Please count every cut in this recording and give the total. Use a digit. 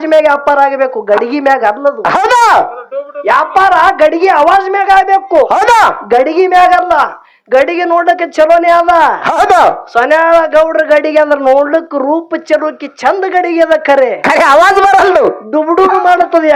0